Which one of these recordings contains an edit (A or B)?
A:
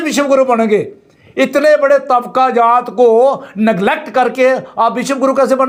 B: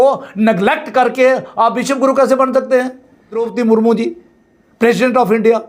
B